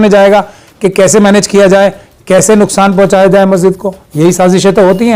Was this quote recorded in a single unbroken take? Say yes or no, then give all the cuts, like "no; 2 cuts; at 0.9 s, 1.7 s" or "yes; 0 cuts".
yes; 0 cuts